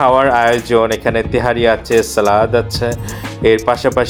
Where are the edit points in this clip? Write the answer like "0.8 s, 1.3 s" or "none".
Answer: none